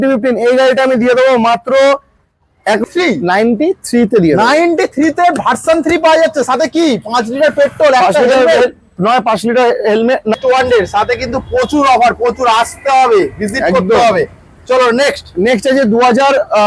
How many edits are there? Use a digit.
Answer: 2